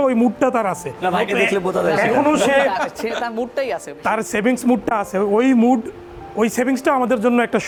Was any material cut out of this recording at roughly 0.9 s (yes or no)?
no